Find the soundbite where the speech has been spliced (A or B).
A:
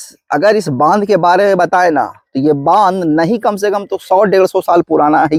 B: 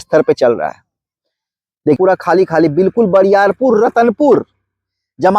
B